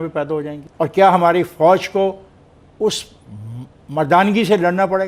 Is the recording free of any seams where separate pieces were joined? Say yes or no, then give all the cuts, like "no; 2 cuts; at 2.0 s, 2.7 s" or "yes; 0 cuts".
yes; 0 cuts